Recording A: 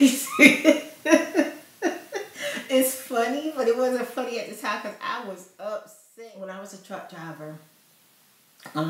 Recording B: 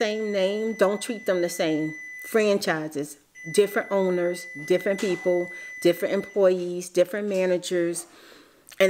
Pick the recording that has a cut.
A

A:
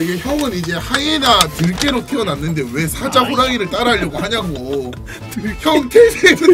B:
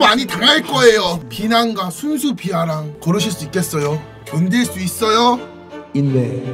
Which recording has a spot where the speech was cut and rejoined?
B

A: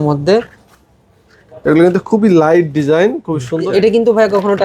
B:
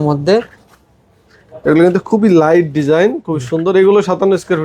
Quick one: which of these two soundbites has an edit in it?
A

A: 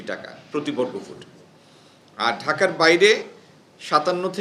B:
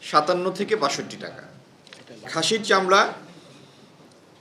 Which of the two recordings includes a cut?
B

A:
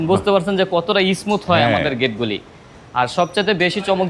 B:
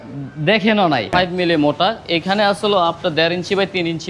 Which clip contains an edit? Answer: B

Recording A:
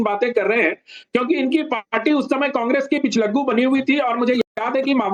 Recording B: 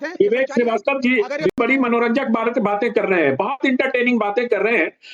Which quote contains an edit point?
B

